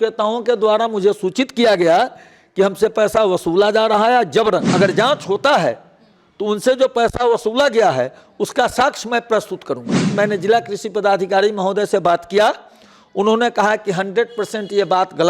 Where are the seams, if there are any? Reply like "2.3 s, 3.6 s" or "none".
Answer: 4.7 s, 10.1 s